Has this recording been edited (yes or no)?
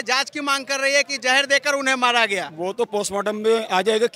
yes